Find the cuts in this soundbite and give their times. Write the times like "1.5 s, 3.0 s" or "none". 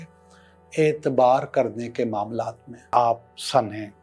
2.9 s